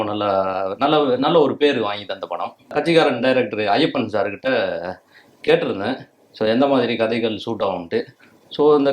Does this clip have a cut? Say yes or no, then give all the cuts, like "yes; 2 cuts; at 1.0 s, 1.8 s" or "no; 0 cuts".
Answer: yes; 1 cut; at 2.7 s